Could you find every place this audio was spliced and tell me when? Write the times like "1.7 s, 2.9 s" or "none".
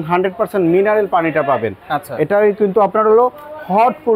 none